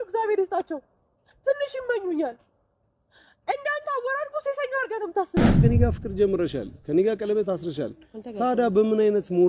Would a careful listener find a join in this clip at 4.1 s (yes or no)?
no